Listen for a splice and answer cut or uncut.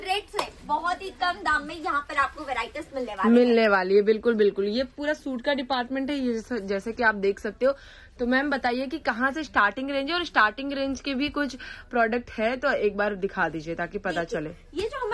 uncut